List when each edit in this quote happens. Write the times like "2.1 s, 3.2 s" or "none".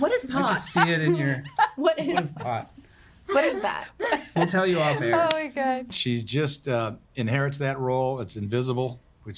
5.9 s

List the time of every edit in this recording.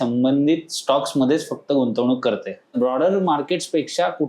2.8 s

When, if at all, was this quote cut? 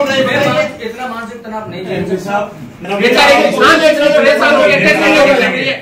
2.8 s

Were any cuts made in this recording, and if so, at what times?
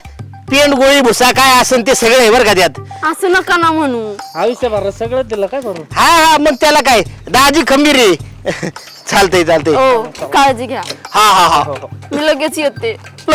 none

